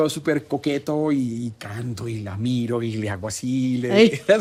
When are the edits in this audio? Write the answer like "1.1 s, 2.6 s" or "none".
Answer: none